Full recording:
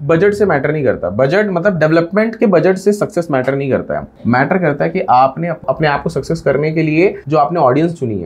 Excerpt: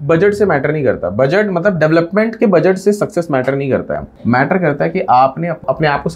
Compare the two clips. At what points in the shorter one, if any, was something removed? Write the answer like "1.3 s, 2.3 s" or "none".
none